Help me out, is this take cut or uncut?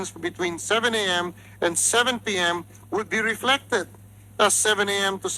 uncut